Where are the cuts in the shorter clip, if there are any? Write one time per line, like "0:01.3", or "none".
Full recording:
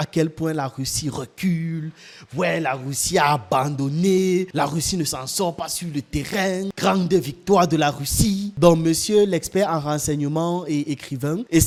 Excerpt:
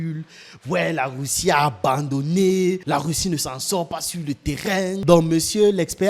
0:05.0